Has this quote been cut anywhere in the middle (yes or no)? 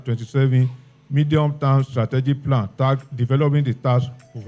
no